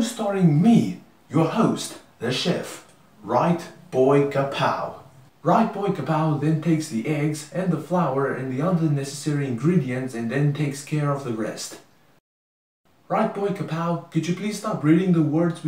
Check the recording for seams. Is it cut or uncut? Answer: cut